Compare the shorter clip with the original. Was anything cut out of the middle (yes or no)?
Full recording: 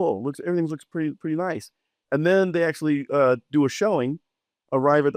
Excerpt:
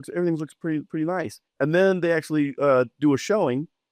yes